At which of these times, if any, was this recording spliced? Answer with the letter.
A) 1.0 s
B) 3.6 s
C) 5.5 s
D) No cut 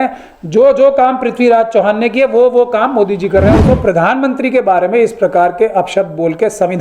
B